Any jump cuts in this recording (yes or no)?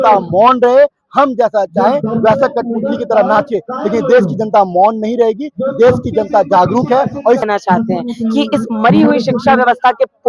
yes